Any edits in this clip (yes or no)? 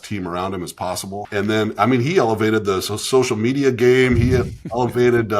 yes